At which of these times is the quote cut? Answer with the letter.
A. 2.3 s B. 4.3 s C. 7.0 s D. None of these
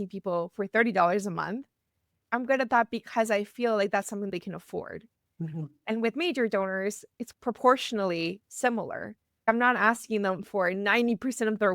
B